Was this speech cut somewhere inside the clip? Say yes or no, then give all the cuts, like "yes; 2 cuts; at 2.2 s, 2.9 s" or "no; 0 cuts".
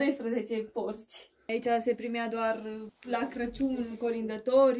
yes; 2 cuts; at 1.5 s, 2.9 s